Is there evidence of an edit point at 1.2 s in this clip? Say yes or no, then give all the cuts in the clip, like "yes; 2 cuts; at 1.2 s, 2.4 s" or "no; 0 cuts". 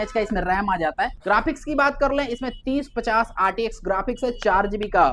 yes; 1 cut; at 1.2 s